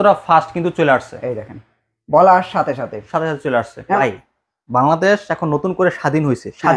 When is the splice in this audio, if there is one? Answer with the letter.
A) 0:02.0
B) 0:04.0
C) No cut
B